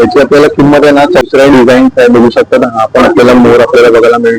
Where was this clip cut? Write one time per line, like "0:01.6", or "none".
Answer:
0:01.2